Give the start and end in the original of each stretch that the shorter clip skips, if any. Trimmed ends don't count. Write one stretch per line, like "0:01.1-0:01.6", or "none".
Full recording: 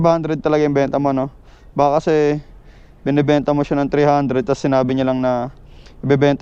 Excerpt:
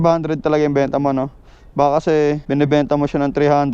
0:02.4-0:03.0